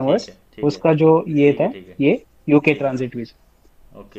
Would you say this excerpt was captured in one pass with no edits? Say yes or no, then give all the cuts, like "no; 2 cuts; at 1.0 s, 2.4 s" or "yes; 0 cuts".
yes; 0 cuts